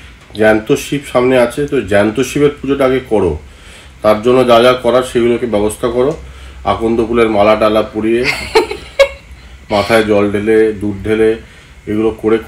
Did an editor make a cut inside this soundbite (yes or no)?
no